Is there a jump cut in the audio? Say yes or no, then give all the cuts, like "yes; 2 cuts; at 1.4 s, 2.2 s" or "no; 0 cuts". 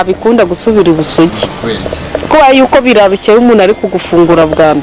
no; 0 cuts